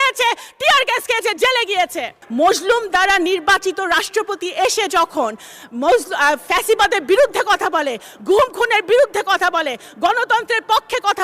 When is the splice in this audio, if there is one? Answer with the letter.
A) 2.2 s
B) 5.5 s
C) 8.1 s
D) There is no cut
A